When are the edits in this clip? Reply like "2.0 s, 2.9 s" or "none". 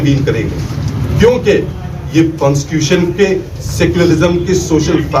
none